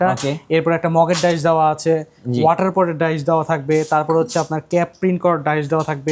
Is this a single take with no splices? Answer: yes; 0 cuts

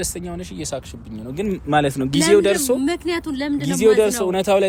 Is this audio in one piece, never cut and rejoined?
yes; 0 cuts

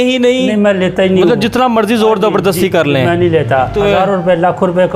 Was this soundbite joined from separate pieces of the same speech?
yes; 1 cut; at 3.7 s

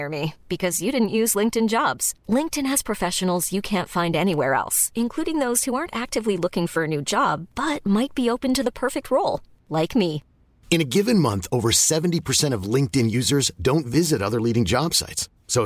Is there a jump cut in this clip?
no; 0 cuts

